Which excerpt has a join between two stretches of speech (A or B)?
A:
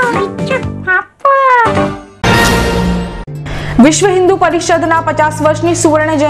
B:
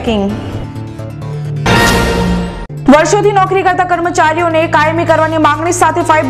A